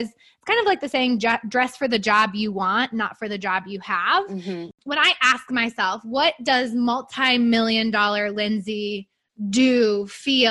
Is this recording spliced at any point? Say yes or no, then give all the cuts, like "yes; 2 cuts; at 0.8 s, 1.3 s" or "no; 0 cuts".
yes; 1 cut; at 4.8 s